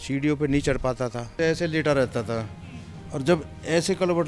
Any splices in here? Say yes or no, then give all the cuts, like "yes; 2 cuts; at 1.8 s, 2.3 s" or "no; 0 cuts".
yes; 1 cut; at 1.4 s